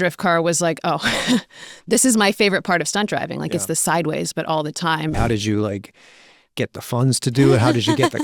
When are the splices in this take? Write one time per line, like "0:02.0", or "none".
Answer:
0:05.2